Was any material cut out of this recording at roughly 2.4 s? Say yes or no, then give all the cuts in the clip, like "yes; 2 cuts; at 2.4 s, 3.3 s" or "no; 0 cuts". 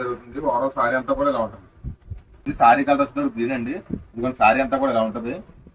yes; 1 cut; at 2.4 s